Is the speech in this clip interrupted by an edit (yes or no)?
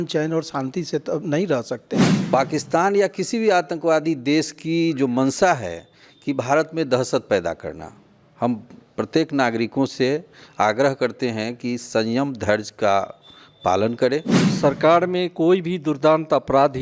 yes